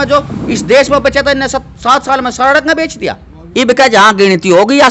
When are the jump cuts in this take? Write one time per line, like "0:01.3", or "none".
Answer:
0:03.5